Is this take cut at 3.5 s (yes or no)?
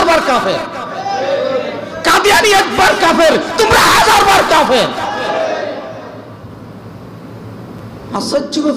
no